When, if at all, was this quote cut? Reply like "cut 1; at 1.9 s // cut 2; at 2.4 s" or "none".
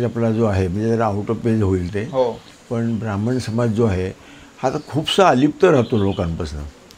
none